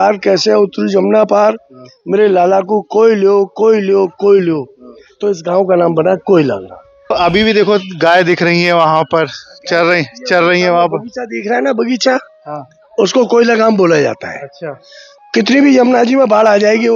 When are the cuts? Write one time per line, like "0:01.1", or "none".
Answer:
0:07.1